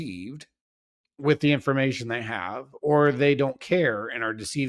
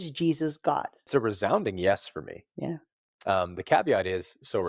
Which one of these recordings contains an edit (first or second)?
second